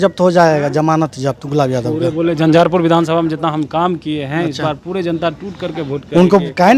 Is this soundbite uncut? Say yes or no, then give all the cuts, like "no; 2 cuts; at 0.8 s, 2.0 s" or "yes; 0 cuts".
yes; 0 cuts